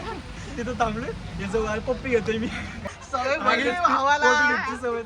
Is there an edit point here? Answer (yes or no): yes